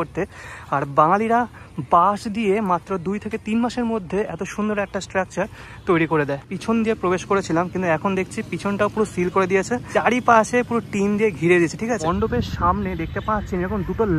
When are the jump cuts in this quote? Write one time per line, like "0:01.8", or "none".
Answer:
0:06.5
0:09.9
0:12.1